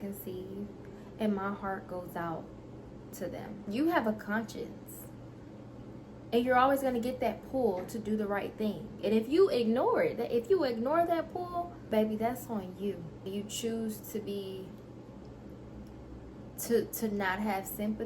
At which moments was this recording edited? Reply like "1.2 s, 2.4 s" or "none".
3.5 s, 11.8 s, 13.2 s